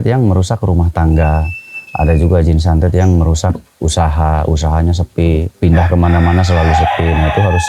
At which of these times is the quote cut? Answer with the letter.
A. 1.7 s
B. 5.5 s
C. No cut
B